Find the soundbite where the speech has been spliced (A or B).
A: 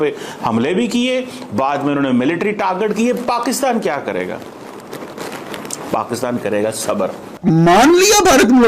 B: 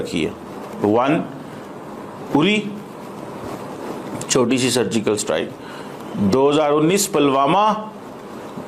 A